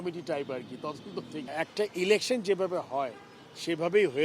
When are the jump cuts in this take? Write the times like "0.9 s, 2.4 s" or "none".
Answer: 1.5 s